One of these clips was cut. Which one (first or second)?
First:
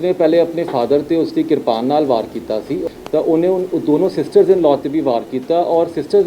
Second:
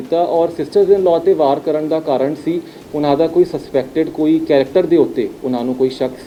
first